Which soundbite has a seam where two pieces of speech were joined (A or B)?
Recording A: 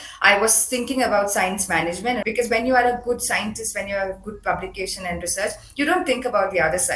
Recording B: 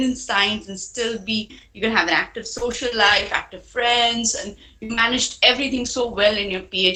A